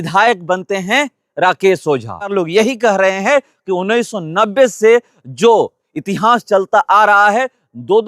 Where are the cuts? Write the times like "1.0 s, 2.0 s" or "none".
2.3 s